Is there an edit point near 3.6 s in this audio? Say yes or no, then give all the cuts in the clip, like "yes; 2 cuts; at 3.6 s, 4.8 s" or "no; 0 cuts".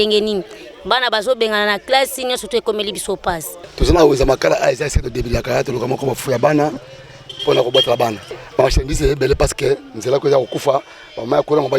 yes; 2 cuts; at 3.6 s, 8.3 s